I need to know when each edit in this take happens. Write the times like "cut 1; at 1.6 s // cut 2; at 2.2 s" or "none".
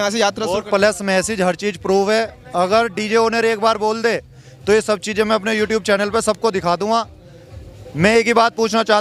none